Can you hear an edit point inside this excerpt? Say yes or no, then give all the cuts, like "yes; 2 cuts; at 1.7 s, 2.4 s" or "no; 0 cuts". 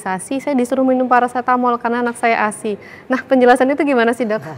no; 0 cuts